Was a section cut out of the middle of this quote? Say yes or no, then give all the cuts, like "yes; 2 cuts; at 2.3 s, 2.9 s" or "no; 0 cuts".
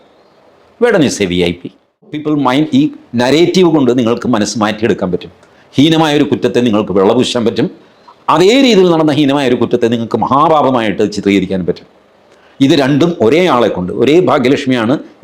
yes; 1 cut; at 2.2 s